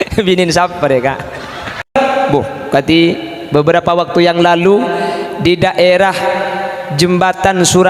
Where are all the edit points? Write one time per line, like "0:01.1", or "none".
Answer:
0:01.9